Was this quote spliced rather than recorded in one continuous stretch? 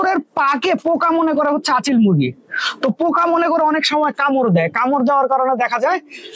no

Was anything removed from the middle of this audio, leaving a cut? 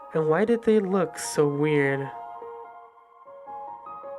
yes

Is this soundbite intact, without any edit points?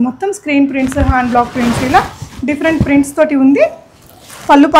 yes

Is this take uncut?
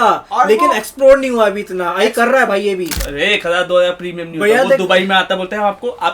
no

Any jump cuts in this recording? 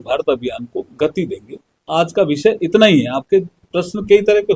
no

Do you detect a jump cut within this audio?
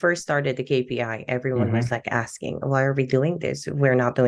no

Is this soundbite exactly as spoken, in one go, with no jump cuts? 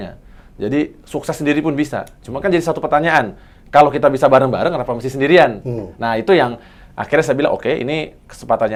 yes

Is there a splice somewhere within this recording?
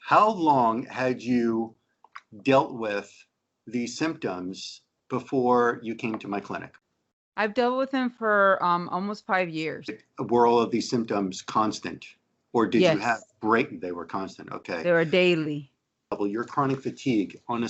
yes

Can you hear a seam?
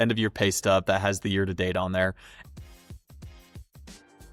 no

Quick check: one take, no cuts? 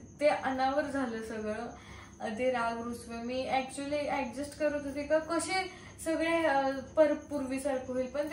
yes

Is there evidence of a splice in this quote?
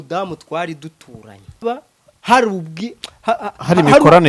yes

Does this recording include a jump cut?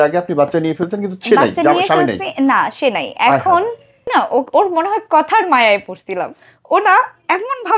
yes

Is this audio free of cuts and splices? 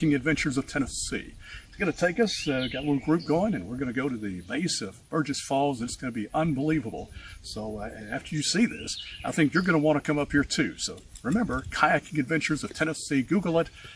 yes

